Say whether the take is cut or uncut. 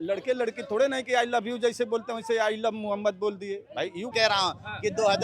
cut